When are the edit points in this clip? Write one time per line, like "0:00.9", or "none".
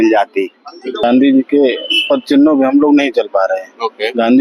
0:01.0